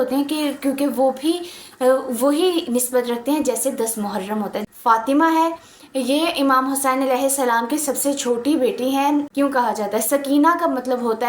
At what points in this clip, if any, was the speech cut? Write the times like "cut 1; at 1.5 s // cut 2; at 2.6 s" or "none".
cut 1; at 4.6 s // cut 2; at 9.3 s